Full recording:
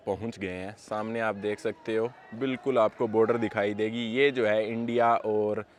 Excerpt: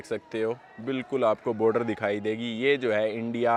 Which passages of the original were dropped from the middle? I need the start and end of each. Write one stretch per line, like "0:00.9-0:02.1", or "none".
none